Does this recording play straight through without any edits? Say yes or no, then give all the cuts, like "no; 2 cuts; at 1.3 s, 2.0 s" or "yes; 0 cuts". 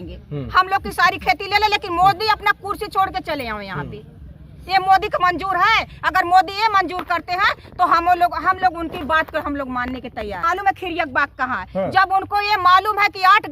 no; 1 cut; at 10.4 s